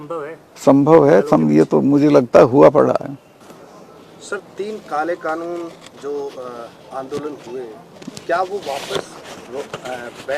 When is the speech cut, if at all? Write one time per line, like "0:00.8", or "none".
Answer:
0:03.6